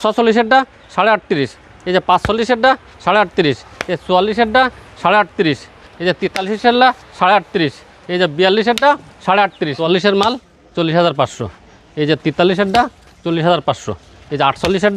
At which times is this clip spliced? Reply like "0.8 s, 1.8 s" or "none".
9.8 s